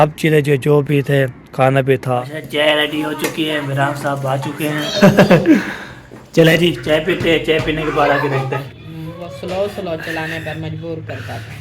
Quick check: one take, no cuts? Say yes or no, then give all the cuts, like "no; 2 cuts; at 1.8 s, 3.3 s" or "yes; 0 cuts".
no; 3 cuts; at 2.3 s, 4.9 s, 8.7 s